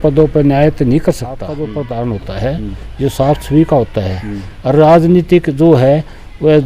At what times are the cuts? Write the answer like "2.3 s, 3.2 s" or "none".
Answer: 1.6 s